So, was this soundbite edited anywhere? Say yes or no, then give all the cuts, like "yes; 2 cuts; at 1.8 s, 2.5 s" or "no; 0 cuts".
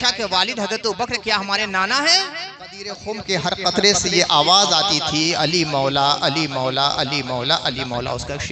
yes; 1 cut; at 3.0 s